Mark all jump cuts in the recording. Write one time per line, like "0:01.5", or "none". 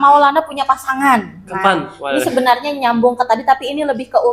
none